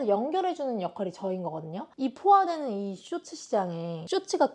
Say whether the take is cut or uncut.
cut